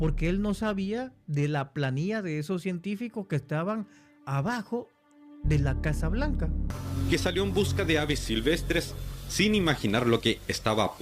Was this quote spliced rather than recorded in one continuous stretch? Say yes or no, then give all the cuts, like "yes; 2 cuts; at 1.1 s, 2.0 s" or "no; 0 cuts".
yes; 1 cut; at 6.8 s